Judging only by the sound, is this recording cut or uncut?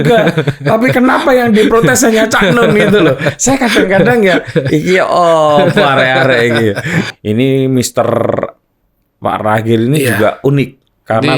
cut